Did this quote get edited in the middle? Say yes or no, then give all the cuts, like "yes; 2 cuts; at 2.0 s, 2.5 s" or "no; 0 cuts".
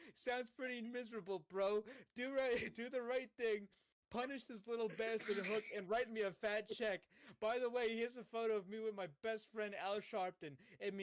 no; 0 cuts